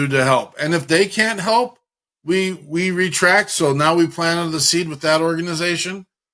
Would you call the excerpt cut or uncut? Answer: uncut